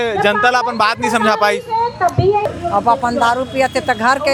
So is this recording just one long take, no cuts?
no; 1 cut; at 2.5 s

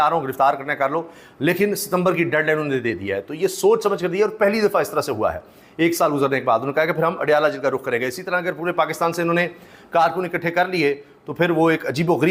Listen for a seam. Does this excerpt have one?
no; 0 cuts

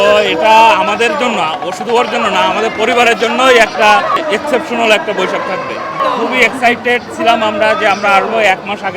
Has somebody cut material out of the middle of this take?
yes; 1 cut; at 6.0 s

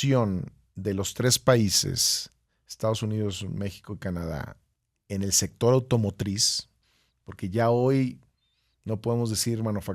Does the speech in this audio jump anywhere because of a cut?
no; 0 cuts

